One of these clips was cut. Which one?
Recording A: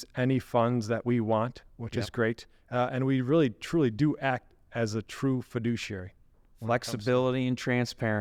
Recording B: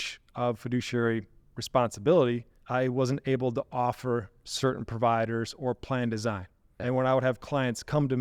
B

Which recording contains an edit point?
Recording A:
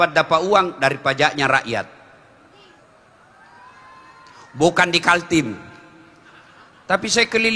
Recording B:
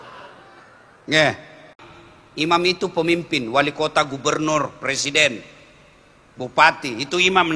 B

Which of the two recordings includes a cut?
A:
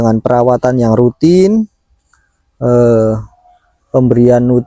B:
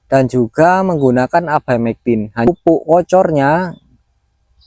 B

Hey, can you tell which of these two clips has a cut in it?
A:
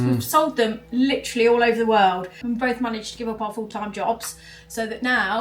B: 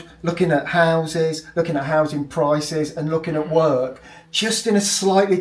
A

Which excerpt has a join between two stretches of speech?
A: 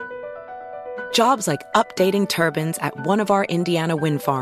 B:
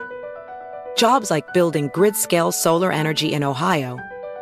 A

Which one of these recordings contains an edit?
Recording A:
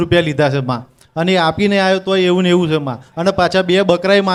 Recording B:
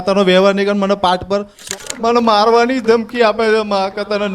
B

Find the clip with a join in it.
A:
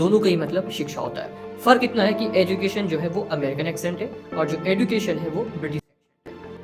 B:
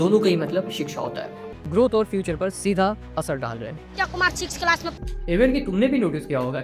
B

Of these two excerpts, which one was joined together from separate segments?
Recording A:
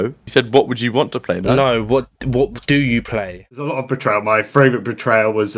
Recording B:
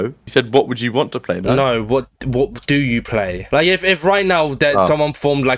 A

